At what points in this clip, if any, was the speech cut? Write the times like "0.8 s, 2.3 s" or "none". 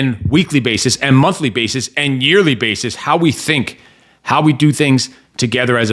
none